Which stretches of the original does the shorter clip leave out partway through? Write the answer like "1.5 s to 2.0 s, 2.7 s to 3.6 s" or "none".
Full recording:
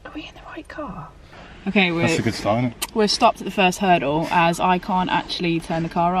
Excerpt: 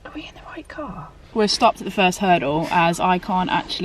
1.2 s to 2.8 s